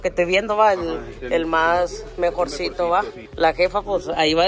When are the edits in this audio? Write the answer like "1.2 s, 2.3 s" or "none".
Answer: none